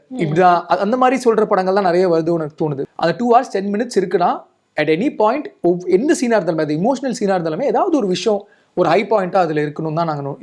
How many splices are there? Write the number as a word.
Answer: one